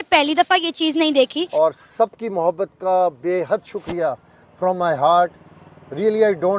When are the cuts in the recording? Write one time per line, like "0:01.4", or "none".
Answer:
0:01.4